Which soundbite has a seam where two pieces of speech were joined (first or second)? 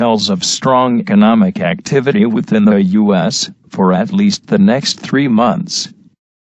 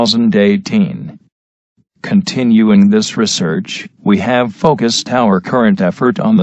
second